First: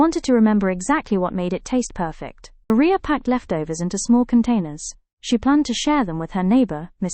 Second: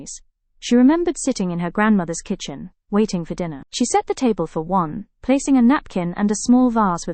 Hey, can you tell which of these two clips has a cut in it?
first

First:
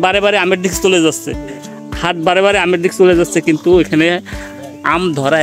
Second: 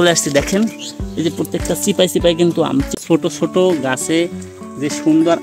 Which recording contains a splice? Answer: second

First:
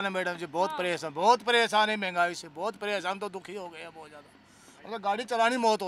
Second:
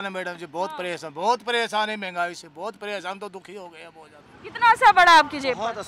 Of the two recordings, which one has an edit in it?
second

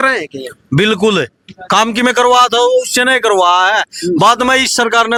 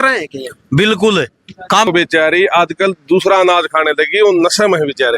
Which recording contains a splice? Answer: second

